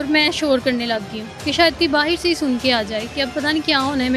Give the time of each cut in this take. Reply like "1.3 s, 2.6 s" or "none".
none